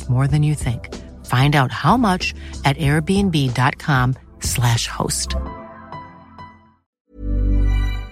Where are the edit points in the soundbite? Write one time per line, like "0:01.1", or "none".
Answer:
0:07.0